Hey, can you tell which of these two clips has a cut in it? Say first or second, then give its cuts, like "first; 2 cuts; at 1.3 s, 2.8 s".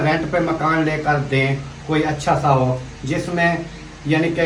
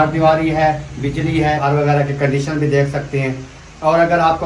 second; 1 cut; at 1.6 s